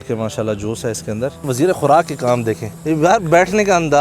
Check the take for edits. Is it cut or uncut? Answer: cut